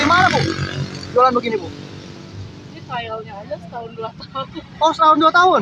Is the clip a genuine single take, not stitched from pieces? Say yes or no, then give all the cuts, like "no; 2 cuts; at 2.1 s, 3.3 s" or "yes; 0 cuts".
yes; 0 cuts